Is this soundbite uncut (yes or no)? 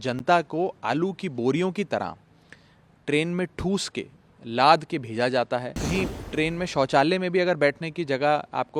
no